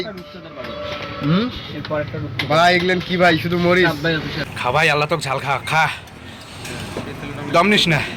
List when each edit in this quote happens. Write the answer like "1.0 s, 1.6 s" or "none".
4.4 s